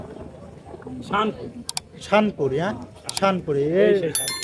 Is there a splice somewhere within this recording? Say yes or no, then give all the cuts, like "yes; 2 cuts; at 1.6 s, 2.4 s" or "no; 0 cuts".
no; 0 cuts